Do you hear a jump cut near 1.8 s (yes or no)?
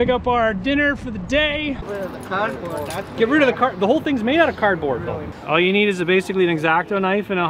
yes